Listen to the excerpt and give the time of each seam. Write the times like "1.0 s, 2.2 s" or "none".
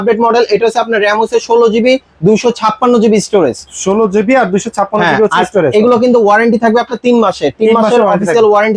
none